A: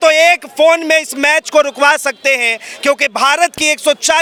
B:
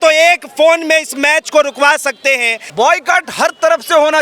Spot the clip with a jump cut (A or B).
B